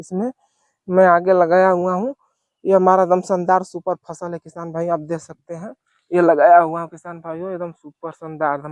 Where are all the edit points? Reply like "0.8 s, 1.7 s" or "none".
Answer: none